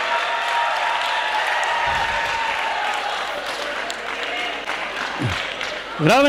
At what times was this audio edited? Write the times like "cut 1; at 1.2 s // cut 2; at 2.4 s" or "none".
none